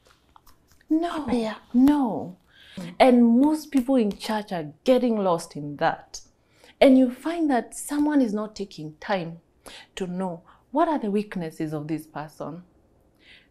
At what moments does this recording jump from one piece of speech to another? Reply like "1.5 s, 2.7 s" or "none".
2.8 s